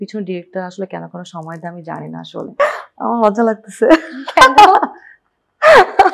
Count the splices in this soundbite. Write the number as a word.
one